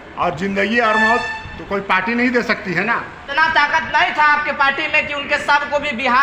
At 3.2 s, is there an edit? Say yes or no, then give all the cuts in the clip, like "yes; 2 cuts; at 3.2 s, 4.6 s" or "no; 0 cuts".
yes; 1 cut; at 3.2 s